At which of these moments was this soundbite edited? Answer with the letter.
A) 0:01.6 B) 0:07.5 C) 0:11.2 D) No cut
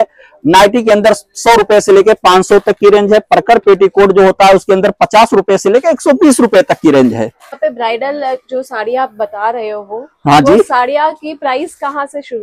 B